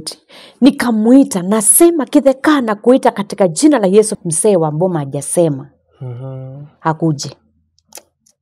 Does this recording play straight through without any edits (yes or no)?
no